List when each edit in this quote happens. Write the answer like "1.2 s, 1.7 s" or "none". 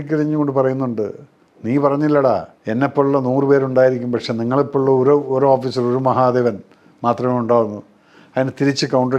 2.5 s